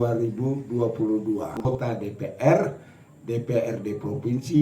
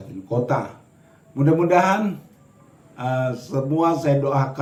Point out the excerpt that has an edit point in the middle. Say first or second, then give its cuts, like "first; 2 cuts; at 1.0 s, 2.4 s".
first; 1 cut; at 1.6 s